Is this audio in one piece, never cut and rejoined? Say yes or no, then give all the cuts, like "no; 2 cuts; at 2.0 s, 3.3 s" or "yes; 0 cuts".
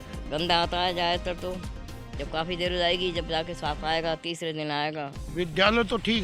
no; 1 cut; at 5.2 s